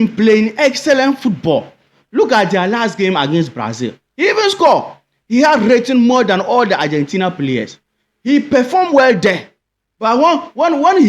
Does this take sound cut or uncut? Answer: uncut